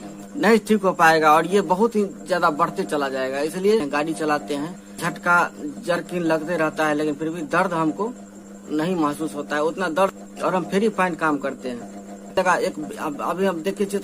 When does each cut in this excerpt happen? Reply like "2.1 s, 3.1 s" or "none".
3.8 s, 5.0 s, 10.1 s, 12.4 s